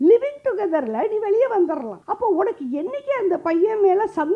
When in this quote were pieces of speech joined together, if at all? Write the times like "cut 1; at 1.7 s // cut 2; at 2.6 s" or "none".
cut 1; at 2.0 s